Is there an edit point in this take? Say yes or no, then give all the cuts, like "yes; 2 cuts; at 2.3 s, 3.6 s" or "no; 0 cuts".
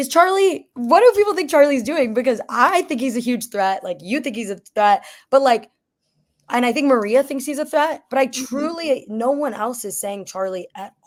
no; 0 cuts